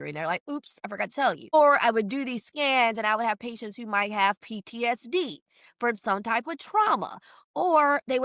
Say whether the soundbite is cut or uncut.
cut